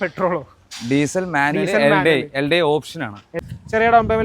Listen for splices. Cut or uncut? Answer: cut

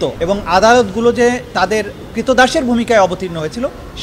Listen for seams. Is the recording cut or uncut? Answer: uncut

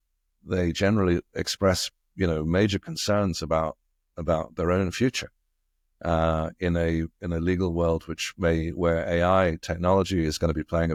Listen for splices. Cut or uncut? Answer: uncut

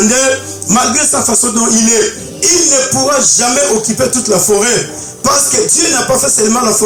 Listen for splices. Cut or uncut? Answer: uncut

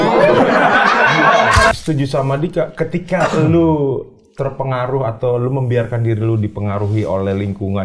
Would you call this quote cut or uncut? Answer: cut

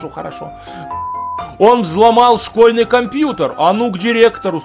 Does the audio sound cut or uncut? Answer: cut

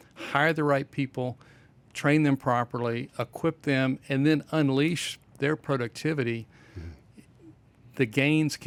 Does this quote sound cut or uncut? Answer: uncut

